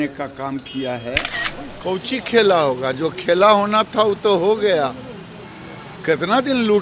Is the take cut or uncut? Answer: cut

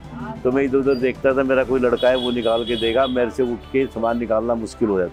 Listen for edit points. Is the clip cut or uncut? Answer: uncut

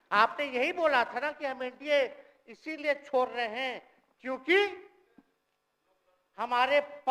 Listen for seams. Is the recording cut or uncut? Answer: uncut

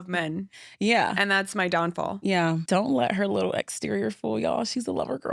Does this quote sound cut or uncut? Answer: cut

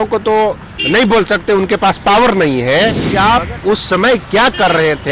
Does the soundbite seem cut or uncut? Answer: cut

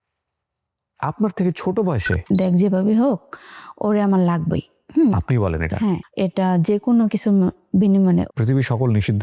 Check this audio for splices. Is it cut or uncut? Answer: cut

